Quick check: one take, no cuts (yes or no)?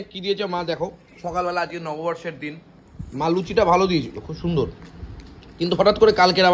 yes